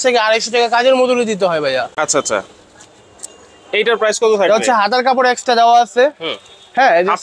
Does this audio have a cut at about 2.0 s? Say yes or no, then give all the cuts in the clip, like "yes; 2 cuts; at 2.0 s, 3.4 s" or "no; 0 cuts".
no; 0 cuts